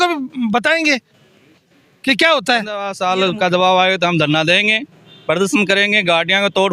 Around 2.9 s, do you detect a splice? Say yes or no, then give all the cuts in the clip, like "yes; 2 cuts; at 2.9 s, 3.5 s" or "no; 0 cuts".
yes; 1 cut; at 2.9 s